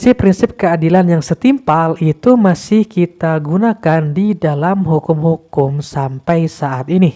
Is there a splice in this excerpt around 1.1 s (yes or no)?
no